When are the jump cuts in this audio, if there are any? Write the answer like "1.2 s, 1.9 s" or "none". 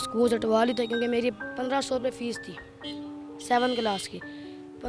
none